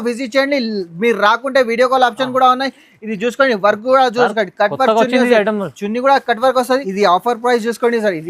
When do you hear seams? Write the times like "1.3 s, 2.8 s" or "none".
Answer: 6.9 s